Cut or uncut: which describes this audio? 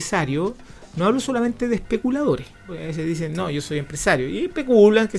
cut